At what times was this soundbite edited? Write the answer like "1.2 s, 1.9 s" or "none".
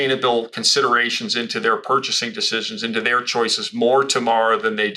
none